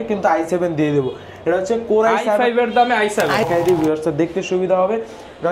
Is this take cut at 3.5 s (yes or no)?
yes